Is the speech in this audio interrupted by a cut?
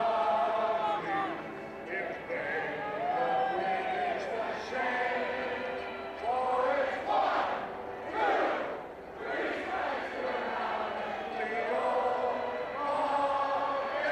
yes; 1 cut; at 1.7 s

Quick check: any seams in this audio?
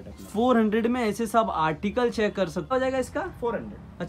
yes; 1 cut; at 2.7 s

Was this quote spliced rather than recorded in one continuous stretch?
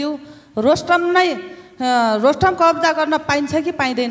no; 0 cuts

